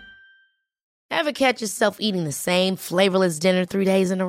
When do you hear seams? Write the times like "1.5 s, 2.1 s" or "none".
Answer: 0.9 s